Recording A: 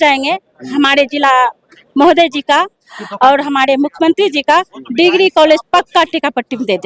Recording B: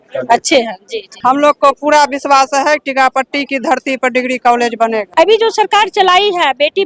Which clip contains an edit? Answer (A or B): B